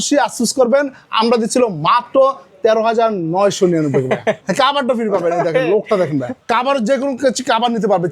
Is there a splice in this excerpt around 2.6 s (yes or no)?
no